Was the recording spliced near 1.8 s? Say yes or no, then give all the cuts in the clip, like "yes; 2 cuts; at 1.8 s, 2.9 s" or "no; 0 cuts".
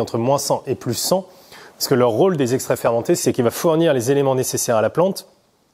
no; 1 cut; at 3.2 s